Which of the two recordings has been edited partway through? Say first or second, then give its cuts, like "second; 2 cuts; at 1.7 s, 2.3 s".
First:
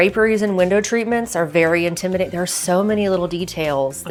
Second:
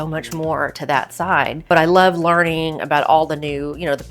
second; 1 cut; at 1.6 s